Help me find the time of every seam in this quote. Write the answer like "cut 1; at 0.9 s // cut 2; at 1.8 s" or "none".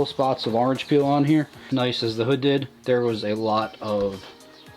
cut 1; at 1.7 s